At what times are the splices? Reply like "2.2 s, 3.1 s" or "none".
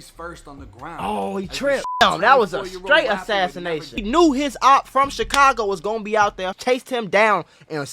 2.0 s, 4.0 s, 6.5 s